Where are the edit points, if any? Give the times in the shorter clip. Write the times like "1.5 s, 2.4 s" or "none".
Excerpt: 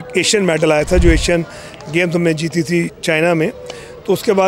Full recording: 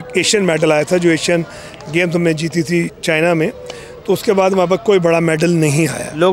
none